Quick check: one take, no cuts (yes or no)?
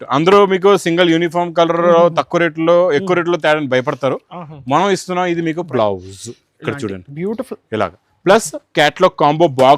no